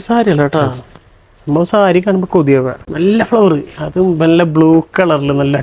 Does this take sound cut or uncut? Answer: cut